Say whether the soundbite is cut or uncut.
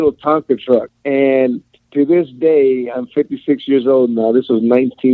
cut